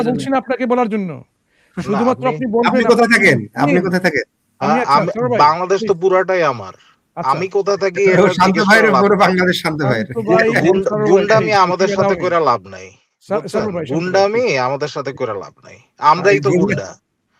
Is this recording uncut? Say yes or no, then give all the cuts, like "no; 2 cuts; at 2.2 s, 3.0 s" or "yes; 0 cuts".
yes; 0 cuts